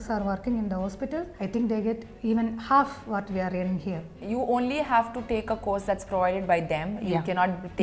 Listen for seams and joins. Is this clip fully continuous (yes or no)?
no